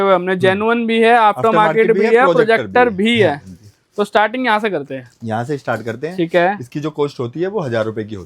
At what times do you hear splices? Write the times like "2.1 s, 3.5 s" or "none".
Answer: none